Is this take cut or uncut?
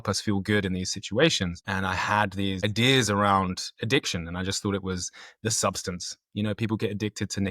cut